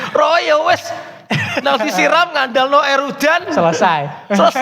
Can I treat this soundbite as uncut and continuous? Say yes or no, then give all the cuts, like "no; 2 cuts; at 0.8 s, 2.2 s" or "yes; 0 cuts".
yes; 0 cuts